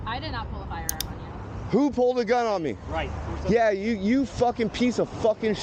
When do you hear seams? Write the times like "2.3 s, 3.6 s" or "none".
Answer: none